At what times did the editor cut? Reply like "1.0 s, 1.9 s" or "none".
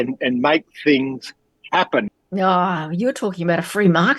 2.1 s